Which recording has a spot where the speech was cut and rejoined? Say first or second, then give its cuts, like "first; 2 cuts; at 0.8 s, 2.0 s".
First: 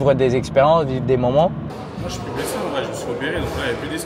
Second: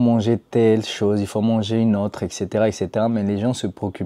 first; 1 cut; at 1.6 s